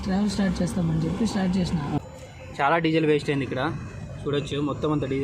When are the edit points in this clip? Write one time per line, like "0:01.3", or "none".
0:02.0

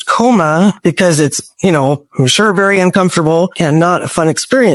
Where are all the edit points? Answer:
none

